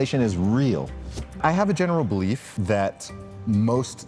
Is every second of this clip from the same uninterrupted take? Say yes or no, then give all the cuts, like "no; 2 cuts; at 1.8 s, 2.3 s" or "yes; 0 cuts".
no; 2 cuts; at 1.4 s, 2.5 s